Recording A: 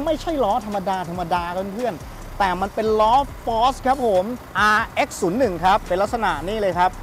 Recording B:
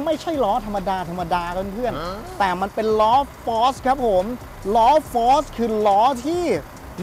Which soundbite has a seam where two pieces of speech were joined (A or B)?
A